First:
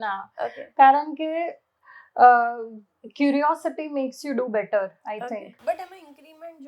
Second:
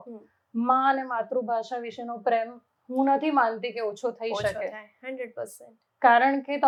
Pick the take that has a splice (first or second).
first